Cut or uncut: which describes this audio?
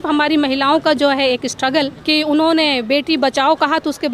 cut